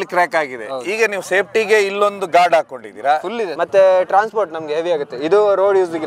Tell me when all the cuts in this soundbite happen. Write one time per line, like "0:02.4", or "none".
0:03.5